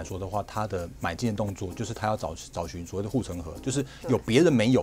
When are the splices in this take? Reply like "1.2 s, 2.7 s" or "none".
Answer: none